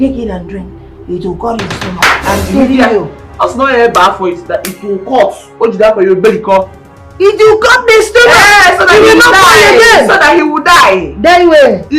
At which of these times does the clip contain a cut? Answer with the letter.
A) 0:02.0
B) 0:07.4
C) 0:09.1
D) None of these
A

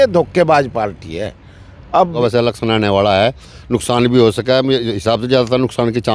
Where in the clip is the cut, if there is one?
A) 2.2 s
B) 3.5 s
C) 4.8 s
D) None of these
A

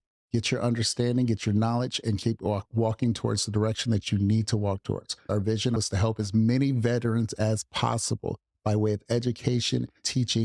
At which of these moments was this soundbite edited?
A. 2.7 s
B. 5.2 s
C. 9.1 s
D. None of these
B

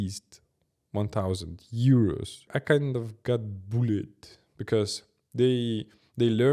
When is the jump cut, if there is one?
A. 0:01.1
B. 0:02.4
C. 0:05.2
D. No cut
B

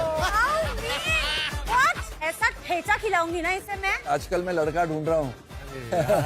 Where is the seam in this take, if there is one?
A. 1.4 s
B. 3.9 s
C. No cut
B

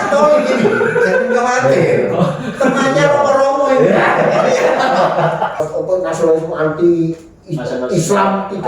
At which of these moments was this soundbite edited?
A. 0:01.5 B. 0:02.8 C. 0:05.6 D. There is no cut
C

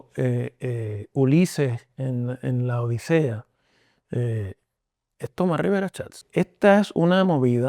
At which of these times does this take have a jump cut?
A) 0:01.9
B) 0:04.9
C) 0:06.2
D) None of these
C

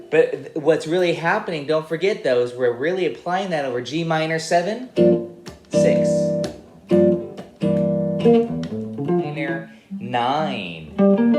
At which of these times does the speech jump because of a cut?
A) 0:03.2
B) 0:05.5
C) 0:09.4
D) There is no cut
C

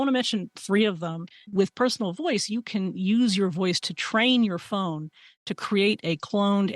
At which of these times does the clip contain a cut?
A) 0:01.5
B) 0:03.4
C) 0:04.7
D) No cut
A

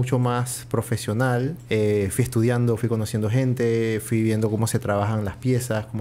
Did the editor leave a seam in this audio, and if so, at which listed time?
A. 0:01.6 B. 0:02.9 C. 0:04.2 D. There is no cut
A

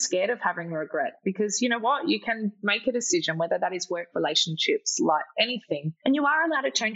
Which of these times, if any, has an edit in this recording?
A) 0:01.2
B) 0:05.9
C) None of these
B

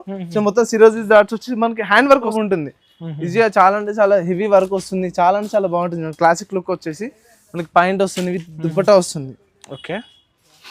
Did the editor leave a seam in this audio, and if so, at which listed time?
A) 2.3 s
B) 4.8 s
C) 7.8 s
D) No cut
A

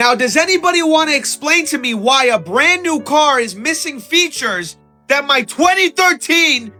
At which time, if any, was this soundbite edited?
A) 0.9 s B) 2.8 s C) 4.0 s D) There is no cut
D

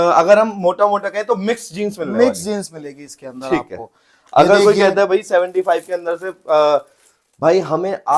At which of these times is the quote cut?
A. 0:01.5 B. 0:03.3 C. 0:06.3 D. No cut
D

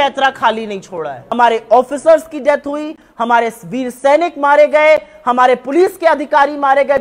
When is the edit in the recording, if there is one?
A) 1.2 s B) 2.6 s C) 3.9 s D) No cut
A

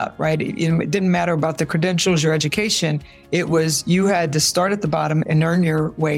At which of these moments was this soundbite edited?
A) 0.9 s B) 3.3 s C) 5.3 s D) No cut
C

